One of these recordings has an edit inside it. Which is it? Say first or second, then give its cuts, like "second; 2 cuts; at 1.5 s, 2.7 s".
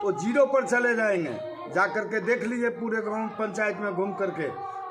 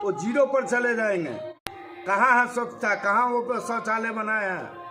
second; 1 cut; at 1.5 s